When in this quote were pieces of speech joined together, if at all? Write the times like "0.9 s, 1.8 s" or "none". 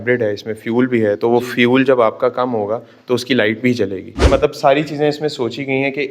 4.3 s